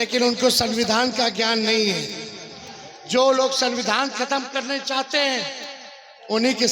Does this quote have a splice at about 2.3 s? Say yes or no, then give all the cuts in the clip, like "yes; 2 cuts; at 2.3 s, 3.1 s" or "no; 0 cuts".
no; 0 cuts